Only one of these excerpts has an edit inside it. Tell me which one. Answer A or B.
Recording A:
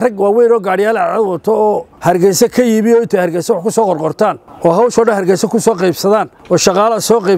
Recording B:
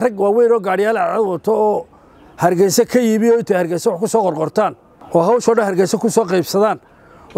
A